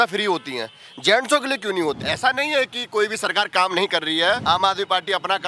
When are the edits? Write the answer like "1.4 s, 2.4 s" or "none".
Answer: 2.0 s, 4.4 s